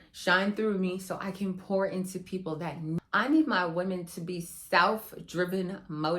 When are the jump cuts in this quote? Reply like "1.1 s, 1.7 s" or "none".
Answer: 3.0 s

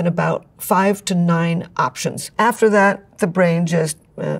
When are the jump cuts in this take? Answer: none

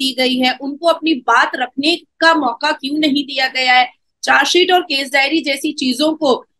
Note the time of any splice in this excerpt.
none

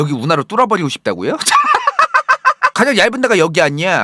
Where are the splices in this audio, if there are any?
2.7 s

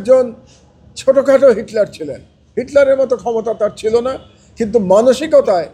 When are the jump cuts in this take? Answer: none

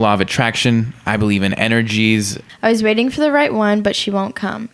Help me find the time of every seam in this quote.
2.4 s

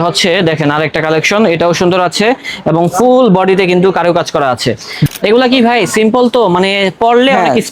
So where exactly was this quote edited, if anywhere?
5.0 s

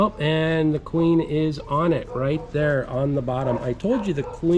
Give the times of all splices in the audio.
none

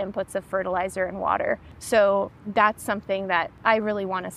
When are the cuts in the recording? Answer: 1.7 s, 2.4 s, 3.5 s

